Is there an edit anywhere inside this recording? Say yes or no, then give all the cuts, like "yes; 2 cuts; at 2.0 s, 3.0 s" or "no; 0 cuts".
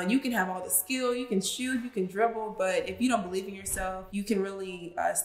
yes; 1 cut; at 4.0 s